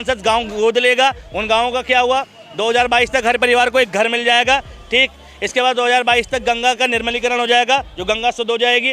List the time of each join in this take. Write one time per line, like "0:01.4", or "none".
none